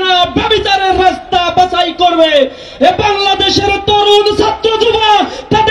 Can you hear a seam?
no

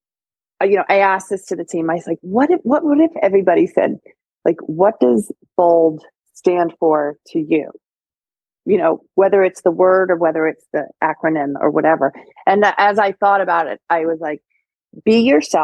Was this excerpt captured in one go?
yes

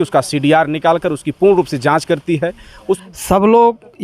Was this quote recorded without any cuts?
no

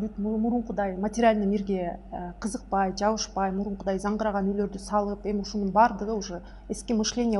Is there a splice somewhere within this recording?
no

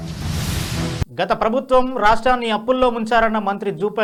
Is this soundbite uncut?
yes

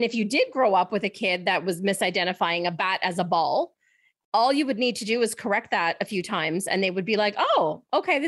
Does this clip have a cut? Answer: no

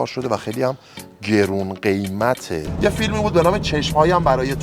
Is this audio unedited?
no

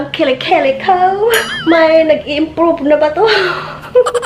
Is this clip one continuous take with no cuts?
no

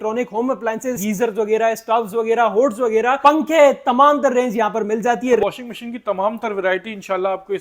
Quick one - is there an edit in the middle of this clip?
yes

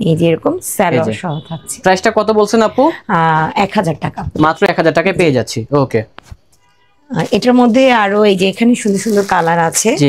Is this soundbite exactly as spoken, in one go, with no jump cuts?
yes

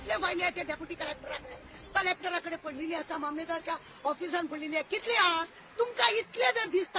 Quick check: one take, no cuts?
yes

